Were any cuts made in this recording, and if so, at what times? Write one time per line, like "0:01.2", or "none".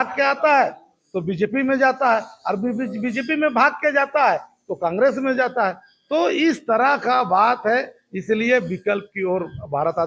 none